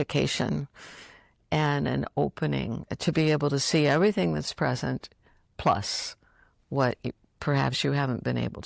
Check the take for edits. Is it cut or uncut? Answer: uncut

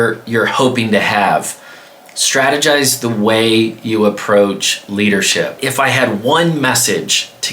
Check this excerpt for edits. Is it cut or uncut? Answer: cut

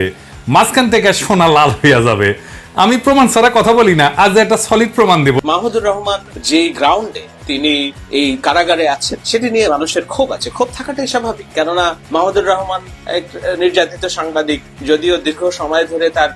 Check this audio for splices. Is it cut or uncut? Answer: cut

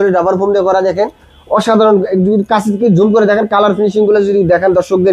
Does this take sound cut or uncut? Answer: uncut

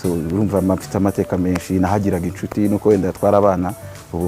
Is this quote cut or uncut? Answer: uncut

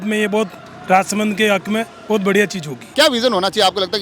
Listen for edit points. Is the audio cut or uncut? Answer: cut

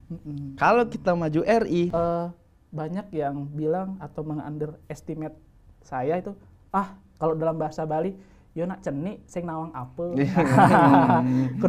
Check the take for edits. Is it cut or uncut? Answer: cut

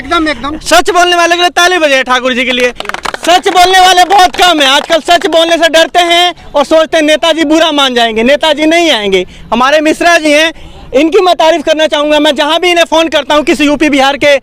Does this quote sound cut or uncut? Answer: uncut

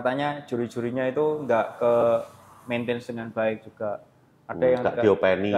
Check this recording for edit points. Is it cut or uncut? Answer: uncut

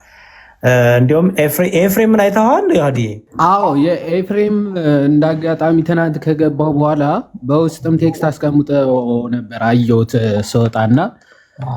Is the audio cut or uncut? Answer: cut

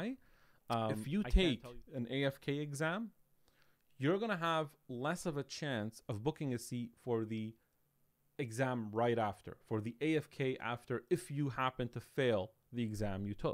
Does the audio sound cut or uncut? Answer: cut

